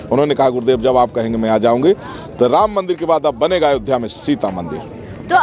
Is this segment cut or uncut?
uncut